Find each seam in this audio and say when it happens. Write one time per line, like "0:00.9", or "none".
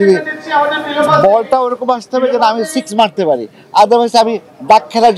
none

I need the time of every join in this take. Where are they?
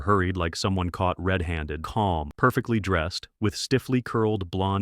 0:01.8

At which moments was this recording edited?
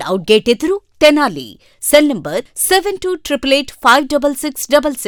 none

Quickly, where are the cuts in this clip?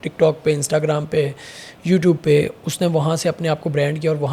none

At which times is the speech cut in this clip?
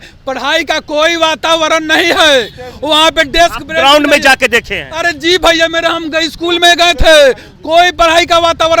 none

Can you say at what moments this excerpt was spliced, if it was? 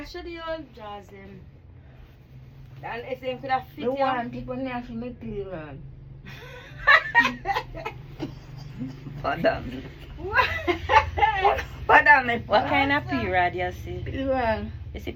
none

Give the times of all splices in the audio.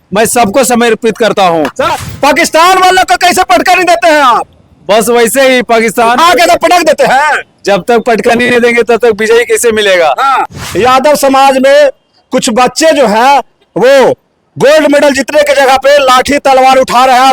0:01.9
0:10.5

